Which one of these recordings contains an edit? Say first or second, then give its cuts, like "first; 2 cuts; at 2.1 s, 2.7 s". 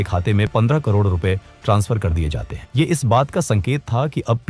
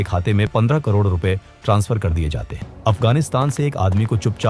second; 1 cut; at 2.7 s